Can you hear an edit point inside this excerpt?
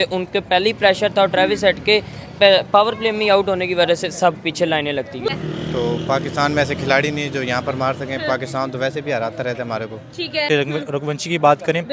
yes; 2 cuts; at 5.3 s, 10.4 s

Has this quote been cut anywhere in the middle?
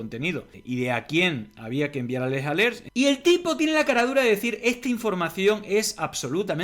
yes; 1 cut; at 2.8 s

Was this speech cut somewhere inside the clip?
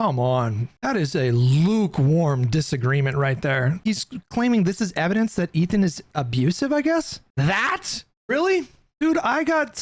yes; 3 cuts; at 3.8 s, 7.2 s, 9.0 s

